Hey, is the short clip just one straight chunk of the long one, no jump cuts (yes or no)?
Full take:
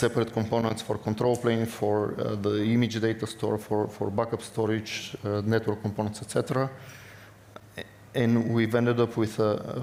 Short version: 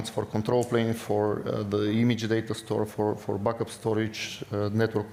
yes